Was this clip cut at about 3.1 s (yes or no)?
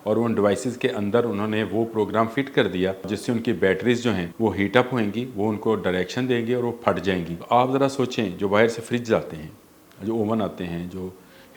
yes